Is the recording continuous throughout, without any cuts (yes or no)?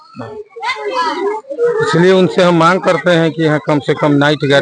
yes